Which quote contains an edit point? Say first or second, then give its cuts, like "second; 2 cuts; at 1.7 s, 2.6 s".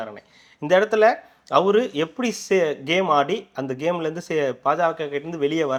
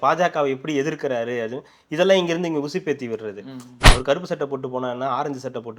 second; 1 cut; at 3.9 s